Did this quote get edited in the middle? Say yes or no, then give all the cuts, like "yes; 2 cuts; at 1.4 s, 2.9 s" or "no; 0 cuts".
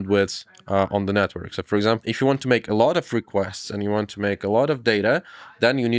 no; 0 cuts